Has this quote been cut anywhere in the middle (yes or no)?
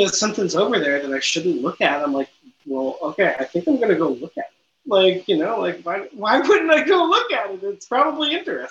no